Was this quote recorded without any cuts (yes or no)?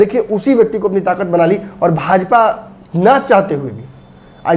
yes